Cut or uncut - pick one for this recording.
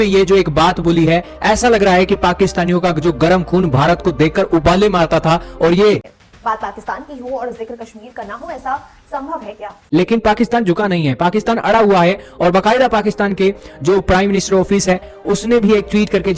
cut